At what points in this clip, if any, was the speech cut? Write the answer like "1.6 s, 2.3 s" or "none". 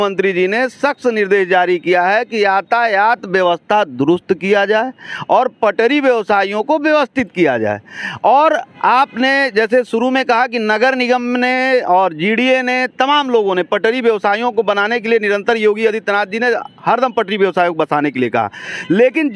none